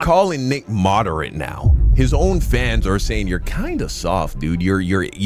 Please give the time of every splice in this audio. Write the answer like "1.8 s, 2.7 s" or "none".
none